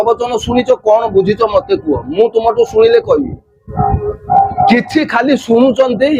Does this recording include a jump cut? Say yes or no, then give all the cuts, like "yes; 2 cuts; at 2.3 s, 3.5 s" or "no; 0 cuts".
no; 0 cuts